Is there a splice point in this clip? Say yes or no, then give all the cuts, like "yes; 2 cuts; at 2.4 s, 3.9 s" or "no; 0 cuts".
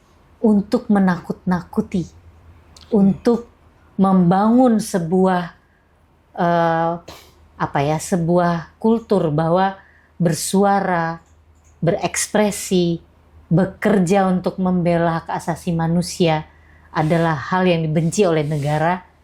no; 0 cuts